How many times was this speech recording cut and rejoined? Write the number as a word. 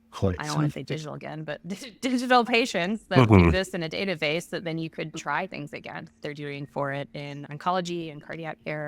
one